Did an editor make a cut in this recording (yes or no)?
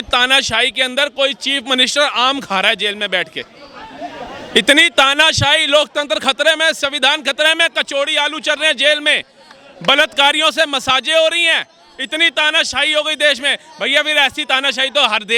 no